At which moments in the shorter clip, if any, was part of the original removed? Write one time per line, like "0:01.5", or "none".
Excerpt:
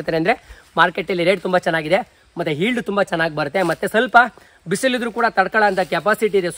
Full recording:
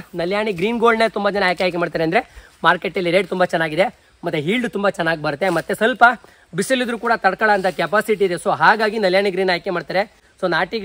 none